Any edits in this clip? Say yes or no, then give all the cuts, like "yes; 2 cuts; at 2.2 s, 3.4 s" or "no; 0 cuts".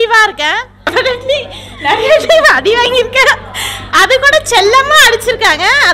yes; 1 cut; at 0.9 s